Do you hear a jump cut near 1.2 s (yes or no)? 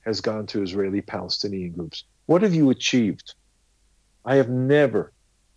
no